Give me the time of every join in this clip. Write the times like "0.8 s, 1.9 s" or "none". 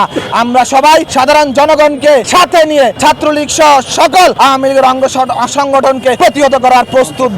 1.1 s, 2.3 s, 3.0 s, 4.3 s, 6.2 s